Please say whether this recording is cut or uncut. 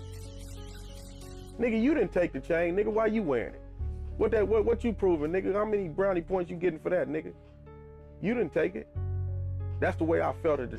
uncut